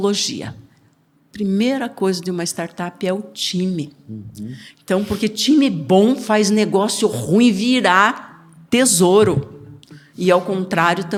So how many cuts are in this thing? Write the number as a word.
zero